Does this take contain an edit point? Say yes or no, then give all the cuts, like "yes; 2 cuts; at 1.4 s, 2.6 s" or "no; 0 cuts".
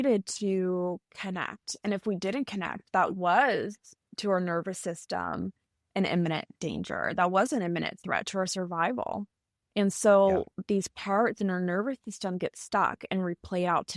no; 0 cuts